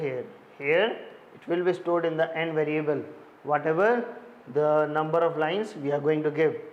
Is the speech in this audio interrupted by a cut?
no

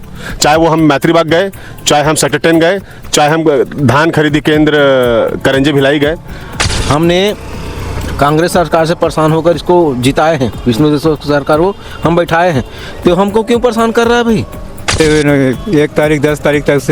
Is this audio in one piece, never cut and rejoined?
no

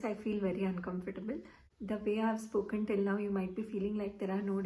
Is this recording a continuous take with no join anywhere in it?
no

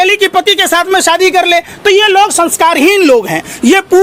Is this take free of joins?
yes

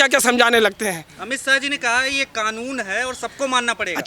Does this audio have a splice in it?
no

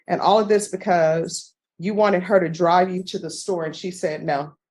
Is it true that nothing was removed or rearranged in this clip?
yes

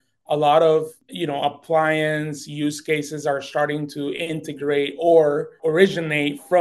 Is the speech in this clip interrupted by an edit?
yes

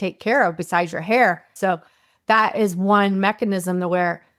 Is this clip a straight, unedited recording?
no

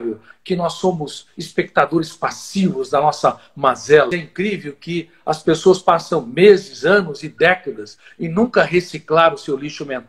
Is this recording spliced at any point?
yes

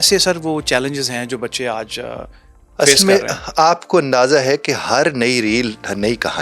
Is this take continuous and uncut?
yes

